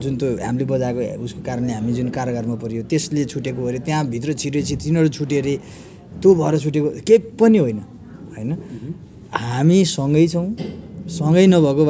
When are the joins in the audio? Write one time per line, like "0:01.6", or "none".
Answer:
none